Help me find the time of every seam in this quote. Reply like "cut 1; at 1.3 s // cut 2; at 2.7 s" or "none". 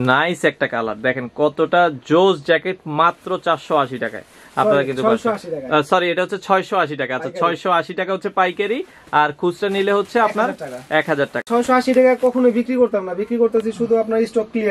none